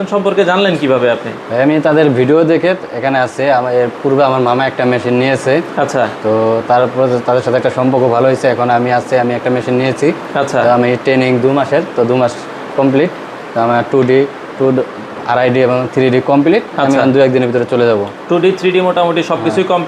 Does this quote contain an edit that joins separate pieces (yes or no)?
no